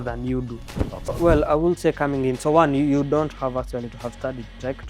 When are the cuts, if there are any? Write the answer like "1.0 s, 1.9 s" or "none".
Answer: 1.1 s